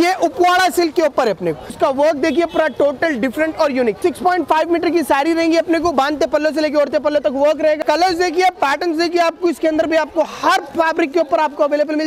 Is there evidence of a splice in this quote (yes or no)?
yes